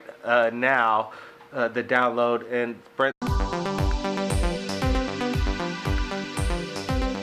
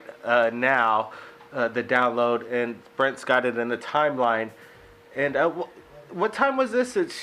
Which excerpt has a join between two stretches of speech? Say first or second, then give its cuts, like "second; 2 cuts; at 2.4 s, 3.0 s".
second; 1 cut; at 3.2 s